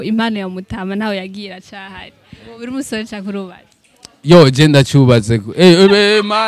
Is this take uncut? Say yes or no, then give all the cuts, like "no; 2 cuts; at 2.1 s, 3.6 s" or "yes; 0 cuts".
no; 1 cut; at 2.2 s